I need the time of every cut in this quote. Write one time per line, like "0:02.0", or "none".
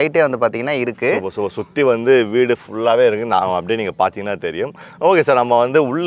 none

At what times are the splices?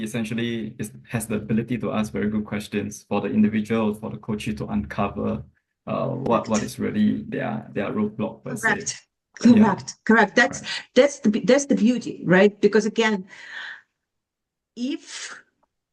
none

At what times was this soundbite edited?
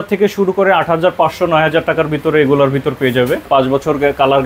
0:03.5

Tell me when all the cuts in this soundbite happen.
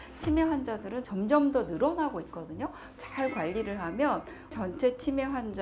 0:03.0
0:04.5

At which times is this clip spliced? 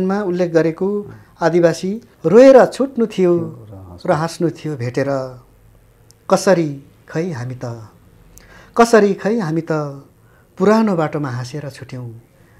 0:02.1

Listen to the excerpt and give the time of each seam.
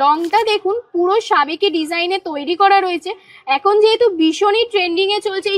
none

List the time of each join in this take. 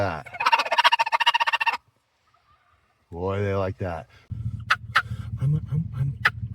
0:04.2

